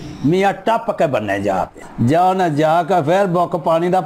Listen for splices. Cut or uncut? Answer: cut